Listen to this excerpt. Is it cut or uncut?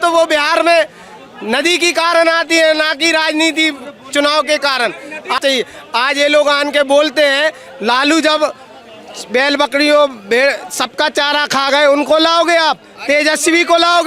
cut